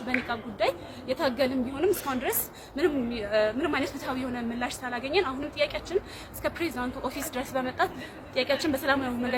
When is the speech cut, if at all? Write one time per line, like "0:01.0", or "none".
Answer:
none